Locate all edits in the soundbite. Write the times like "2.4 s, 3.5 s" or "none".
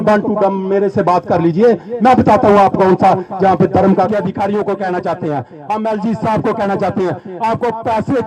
4.1 s